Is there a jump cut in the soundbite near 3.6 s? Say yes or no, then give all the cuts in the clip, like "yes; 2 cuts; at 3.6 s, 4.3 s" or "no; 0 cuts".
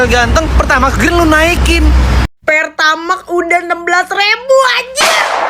no; 1 cut; at 2.2 s